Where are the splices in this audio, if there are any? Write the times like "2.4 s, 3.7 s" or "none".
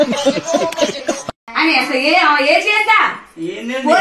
1.4 s